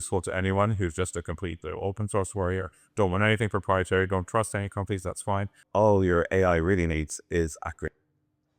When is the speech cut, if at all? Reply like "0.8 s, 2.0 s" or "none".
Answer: 5.6 s